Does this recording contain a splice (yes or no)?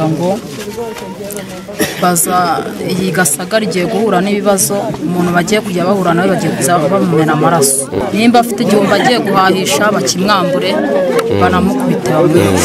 no